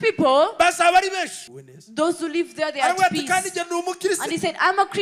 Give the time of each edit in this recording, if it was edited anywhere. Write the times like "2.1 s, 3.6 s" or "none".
1.4 s